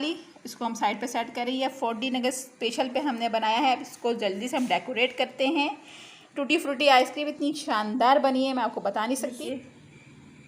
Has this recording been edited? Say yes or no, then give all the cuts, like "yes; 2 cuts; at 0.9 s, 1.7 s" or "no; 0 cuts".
yes; 1 cut; at 9.4 s